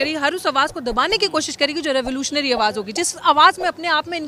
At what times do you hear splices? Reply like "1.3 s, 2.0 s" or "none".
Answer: none

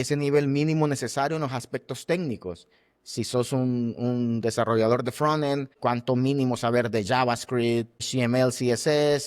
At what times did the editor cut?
5.7 s, 8.1 s

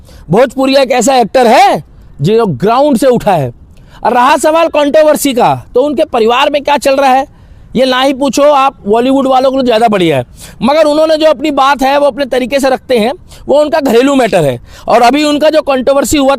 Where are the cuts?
none

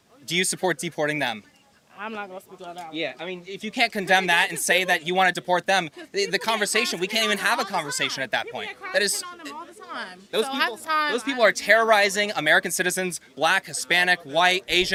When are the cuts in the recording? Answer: none

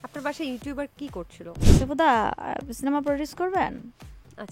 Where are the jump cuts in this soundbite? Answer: 1.7 s

